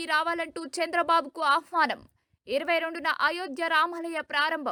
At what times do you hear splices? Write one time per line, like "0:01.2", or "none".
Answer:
none